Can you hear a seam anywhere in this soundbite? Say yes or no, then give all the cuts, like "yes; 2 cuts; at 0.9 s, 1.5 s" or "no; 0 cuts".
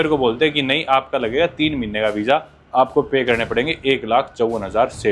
no; 0 cuts